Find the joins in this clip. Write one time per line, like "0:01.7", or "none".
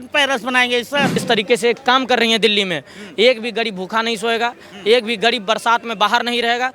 0:01.2